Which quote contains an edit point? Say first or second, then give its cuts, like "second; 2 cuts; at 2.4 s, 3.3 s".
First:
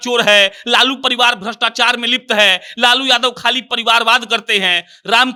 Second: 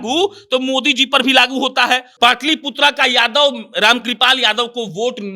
second; 1 cut; at 2.1 s